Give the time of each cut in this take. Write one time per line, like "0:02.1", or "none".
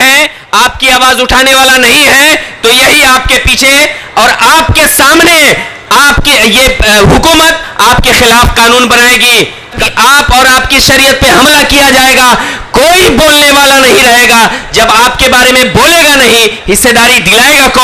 0:09.8